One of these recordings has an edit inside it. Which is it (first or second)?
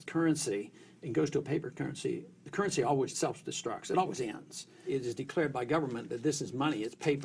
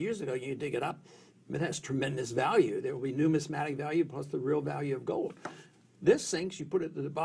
first